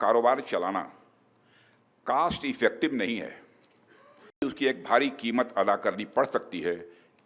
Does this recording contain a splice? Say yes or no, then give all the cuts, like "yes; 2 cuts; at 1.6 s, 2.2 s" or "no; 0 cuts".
yes; 1 cut; at 4.4 s